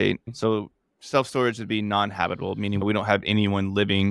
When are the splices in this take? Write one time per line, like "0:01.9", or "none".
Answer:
0:02.8